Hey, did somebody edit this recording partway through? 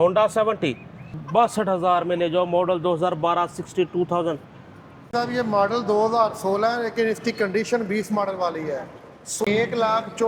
yes; 3 cuts; at 1.1 s, 5.1 s, 9.4 s

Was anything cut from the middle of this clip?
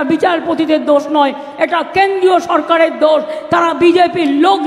no; 0 cuts

